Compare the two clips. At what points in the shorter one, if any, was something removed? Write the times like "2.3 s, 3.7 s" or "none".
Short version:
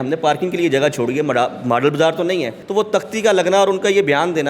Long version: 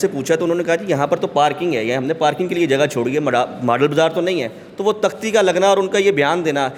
2.6 s